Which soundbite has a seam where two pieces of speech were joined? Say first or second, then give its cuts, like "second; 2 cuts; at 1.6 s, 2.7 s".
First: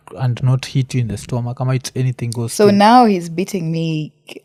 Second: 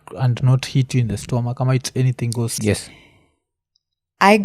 second; 1 cut; at 2.5 s